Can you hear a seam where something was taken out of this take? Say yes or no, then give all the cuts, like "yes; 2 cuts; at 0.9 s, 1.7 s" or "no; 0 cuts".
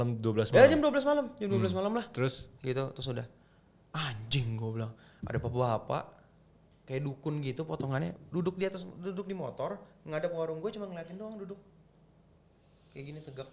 no; 0 cuts